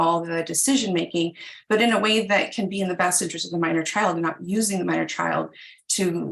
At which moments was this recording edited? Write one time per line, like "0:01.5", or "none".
none